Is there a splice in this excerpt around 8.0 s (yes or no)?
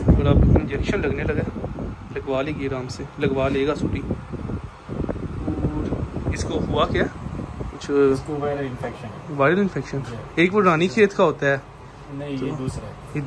no